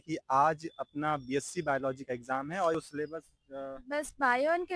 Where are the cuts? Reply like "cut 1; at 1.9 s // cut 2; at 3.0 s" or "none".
cut 1; at 2.7 s